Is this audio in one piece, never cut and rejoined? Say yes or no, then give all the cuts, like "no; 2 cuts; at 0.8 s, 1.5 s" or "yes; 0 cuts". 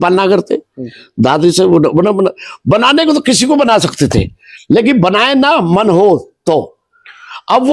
yes; 0 cuts